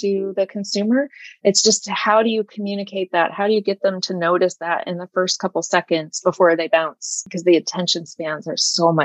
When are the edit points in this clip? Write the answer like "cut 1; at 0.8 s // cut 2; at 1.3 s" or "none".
cut 1; at 7.2 s

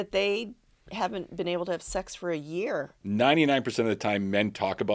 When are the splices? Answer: cut 1; at 2.9 s

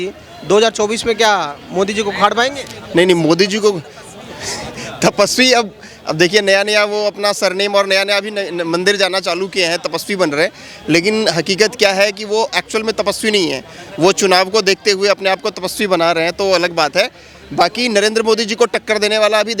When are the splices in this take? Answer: none

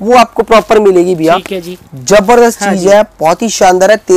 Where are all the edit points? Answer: none

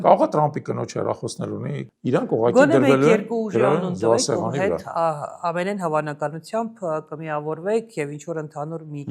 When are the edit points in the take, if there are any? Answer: cut 1; at 1.9 s

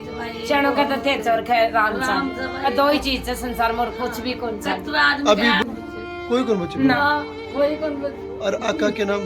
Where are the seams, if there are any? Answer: cut 1; at 5.6 s

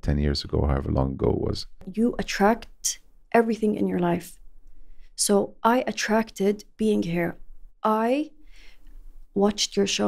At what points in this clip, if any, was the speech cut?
cut 1; at 1.9 s

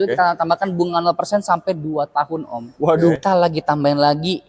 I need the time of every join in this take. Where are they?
cut 1; at 3.2 s

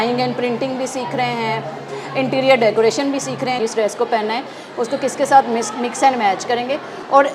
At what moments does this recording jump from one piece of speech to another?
cut 1; at 3.6 s

